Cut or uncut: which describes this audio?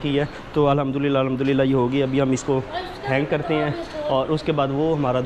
uncut